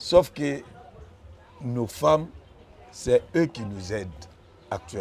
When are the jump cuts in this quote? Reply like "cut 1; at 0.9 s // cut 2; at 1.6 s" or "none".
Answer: none